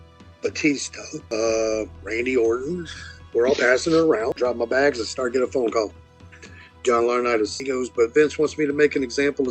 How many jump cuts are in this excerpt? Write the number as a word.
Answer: two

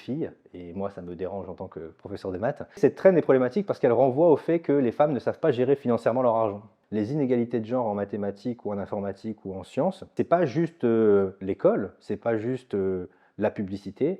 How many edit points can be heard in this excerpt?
three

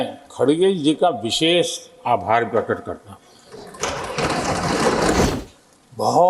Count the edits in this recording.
one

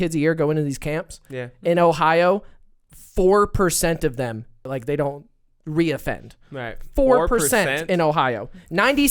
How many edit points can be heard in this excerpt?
one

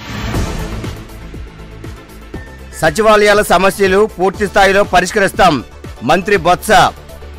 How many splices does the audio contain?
one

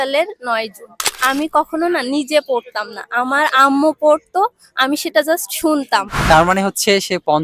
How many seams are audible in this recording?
two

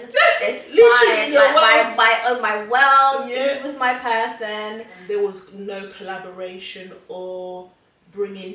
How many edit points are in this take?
one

